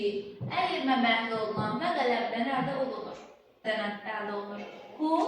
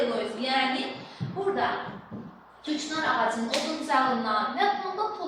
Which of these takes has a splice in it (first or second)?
first